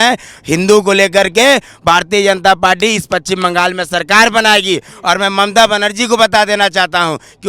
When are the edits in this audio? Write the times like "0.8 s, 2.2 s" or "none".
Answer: none